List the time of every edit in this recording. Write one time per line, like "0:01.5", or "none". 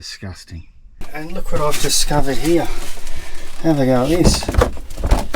0:01.1

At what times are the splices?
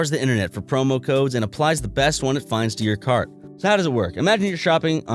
0:03.5

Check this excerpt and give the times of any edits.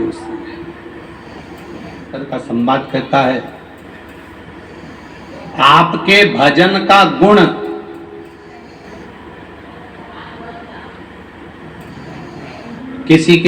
0:02.3

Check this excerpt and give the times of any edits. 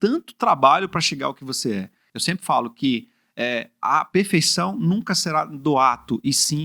0:02.1

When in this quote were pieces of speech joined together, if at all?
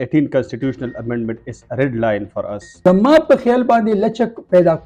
0:02.6

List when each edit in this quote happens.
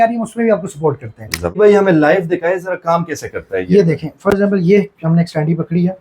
0:01.4

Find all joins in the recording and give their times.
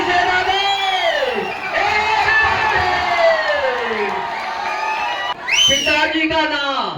0:05.3

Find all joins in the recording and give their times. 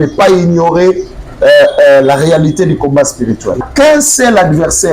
0:03.6

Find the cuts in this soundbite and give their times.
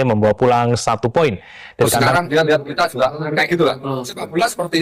0:02.1

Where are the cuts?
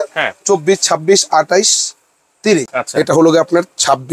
0:02.7

